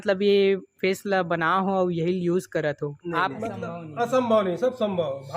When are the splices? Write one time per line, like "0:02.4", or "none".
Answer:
0:03.4